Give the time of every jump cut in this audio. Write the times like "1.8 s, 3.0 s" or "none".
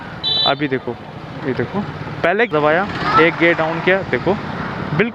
2.5 s